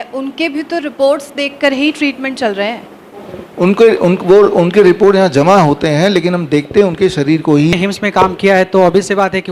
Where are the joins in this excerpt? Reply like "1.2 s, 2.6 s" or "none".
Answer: 7.7 s